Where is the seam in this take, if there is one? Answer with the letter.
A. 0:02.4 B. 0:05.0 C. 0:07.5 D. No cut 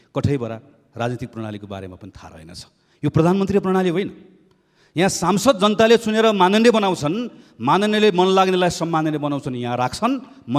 A